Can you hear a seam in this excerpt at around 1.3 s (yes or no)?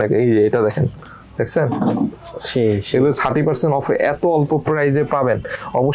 no